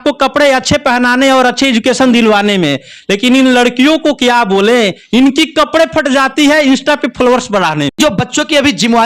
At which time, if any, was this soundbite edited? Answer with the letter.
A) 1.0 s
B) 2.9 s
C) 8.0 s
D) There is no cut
C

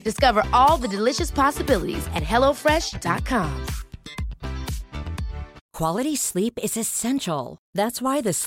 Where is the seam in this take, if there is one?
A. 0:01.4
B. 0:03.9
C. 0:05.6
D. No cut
C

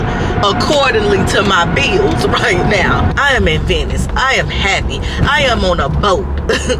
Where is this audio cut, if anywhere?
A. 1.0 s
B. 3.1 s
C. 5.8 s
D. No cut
B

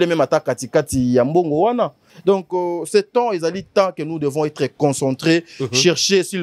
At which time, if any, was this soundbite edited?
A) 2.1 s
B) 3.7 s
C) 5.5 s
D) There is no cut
A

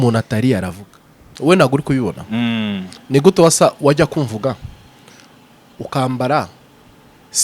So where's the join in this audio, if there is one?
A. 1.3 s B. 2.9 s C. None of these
A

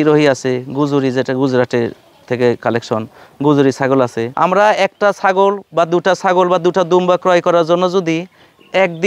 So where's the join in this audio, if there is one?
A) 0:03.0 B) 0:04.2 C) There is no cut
B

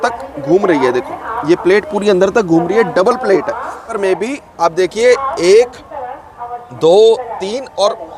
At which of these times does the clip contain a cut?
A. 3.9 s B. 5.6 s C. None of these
A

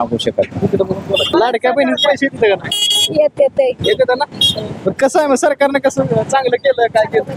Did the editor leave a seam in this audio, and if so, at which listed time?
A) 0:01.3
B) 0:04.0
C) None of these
A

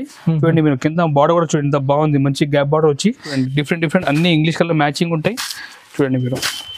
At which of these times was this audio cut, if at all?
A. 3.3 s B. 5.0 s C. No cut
A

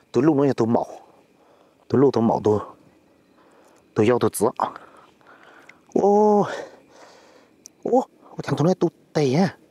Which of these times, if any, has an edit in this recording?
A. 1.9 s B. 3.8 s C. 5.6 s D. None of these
D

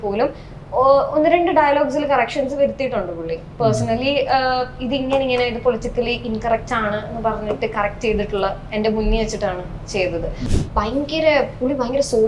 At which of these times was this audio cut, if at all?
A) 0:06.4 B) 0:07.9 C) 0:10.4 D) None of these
C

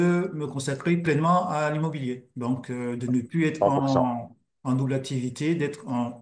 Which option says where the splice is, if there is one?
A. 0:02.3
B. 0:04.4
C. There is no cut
C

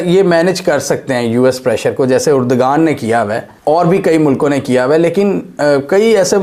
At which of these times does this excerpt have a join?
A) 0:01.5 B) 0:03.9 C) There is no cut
C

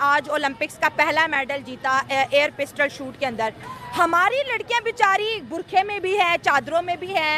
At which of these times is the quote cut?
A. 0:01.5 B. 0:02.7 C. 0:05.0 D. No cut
D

